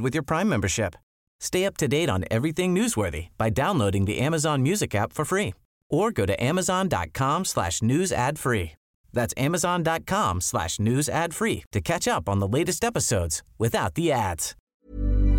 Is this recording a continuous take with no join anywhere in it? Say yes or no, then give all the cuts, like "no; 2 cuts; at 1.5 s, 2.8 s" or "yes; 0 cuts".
no; 1 cut; at 14.5 s